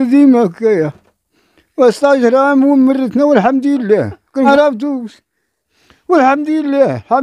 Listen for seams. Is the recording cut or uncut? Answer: cut